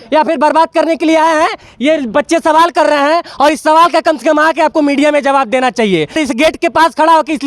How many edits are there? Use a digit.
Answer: 1